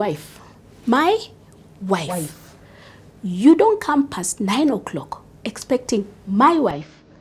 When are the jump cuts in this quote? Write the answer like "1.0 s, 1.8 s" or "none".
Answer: none